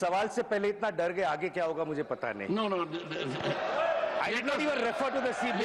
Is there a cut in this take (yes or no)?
no